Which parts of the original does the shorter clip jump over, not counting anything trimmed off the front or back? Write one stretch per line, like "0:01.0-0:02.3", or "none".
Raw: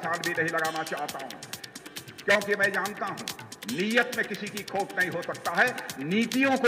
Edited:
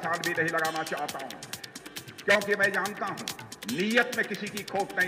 none